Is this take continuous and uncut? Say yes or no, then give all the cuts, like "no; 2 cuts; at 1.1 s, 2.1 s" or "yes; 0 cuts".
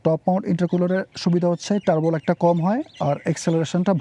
no; 1 cut; at 1.1 s